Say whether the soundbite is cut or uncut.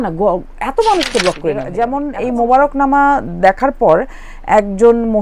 cut